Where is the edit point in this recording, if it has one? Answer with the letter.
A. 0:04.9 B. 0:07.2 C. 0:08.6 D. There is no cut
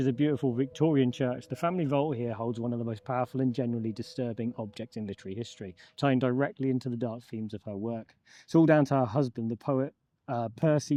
D